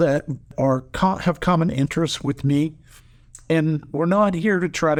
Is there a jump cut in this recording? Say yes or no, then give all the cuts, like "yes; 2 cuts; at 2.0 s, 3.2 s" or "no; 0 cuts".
no; 0 cuts